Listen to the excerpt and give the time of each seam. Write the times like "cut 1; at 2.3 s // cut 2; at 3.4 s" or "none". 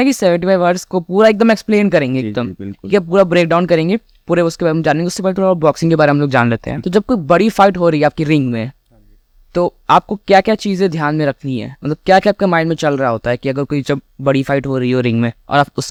none

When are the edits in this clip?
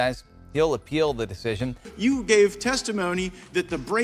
cut 1; at 1.8 s

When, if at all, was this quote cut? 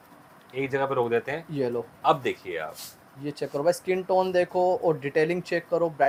none

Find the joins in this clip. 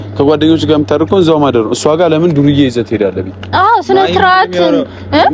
none

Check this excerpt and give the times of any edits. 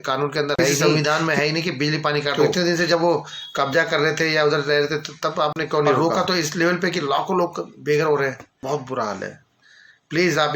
cut 1; at 0.8 s // cut 2; at 2.3 s // cut 3; at 6.0 s // cut 4; at 8.5 s

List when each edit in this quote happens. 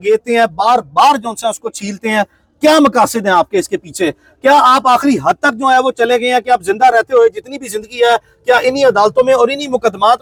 none

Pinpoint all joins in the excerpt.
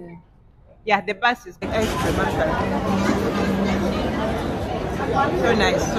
cut 1; at 1.6 s

